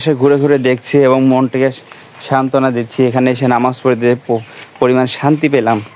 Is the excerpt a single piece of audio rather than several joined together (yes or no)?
yes